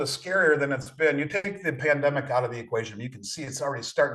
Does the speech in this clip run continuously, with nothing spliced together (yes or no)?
yes